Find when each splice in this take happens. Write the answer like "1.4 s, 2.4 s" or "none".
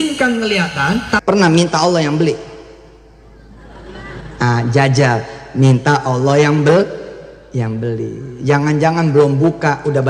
1.2 s